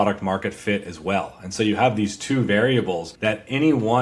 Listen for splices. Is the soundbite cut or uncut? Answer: cut